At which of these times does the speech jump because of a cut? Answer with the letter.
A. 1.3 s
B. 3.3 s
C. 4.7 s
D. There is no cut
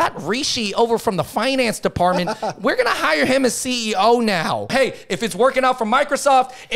C